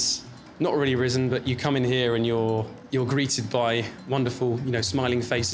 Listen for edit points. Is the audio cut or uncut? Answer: cut